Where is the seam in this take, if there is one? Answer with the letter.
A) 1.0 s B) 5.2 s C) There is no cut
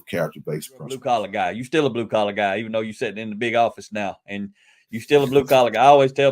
A